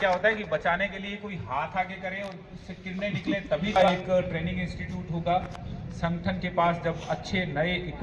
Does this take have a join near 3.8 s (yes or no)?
yes